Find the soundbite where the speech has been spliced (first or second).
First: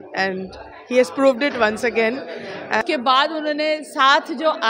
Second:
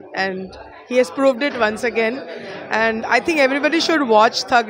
first